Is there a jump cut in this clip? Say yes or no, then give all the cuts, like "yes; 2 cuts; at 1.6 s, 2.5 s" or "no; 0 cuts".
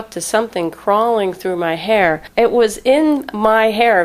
yes; 1 cut; at 2.2 s